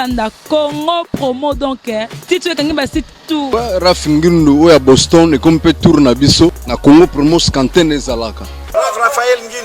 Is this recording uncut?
no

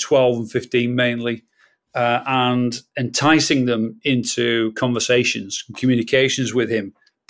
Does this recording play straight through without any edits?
yes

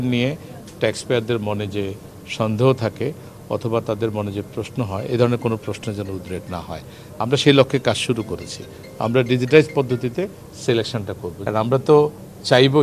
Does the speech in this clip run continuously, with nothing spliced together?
no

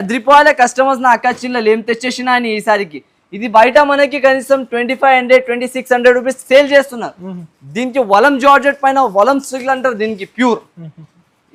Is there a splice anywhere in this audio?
no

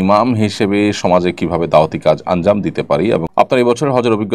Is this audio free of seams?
no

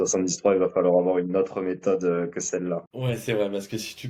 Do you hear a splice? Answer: no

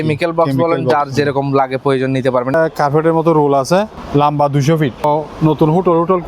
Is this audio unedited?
no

